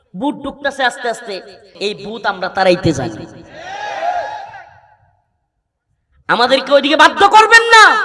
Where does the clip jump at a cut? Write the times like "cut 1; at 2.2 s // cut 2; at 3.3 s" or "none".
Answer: cut 1; at 1.7 s